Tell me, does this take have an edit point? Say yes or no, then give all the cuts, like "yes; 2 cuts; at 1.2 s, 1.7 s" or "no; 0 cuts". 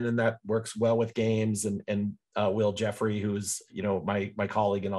no; 0 cuts